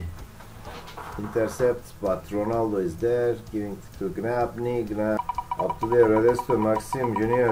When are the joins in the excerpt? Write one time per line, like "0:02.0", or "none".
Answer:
0:05.2

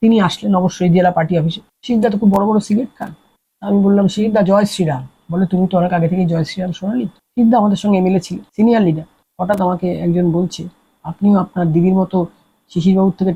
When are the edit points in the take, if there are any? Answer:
none

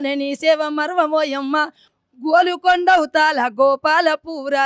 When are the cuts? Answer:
0:01.8

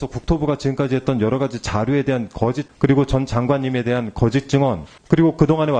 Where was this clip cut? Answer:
0:02.7
0:04.9

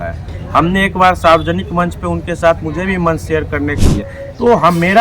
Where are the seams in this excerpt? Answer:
0:03.8

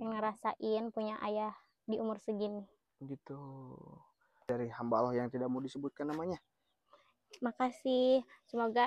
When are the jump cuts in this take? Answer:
0:04.5

